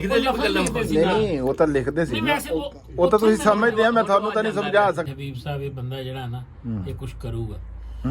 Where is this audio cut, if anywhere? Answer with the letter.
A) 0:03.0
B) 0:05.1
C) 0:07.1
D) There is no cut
B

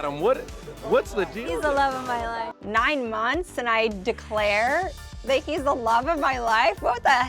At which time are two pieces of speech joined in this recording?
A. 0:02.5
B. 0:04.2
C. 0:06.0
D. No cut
A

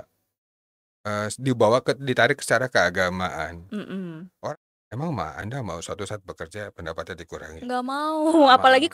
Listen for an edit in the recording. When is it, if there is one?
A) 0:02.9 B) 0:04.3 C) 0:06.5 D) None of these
B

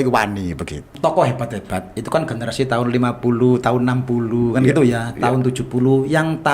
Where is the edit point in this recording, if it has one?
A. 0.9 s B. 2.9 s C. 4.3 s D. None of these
A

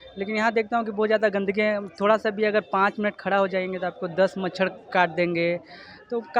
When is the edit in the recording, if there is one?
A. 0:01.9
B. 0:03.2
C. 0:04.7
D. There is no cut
D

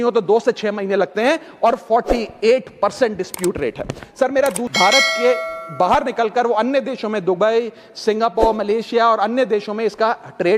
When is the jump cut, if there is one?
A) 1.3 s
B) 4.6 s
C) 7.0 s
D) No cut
B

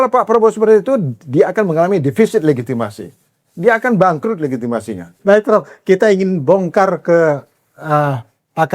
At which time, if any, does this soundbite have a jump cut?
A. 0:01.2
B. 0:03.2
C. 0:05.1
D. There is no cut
C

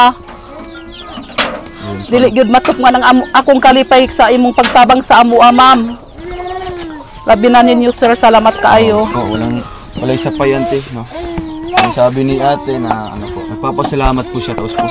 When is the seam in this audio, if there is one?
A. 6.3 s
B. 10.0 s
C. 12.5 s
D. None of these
D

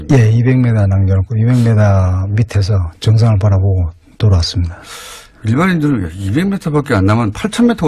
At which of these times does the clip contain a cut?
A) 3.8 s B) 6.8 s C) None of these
A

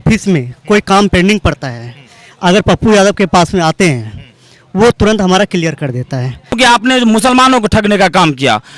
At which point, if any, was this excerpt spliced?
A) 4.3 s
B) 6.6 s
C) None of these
B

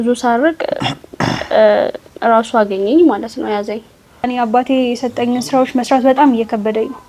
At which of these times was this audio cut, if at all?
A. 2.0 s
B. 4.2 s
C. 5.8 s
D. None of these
B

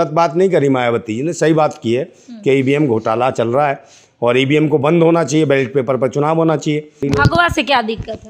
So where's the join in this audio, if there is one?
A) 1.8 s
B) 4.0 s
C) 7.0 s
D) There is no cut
C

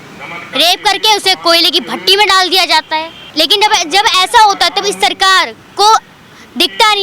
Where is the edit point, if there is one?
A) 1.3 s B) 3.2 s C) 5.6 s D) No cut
B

